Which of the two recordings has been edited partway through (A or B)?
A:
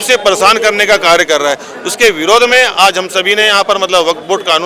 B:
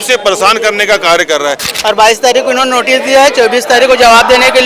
B